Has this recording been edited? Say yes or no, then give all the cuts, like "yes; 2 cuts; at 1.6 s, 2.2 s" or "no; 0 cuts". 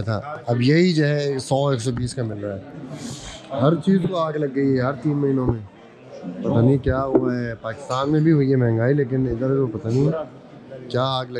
no; 0 cuts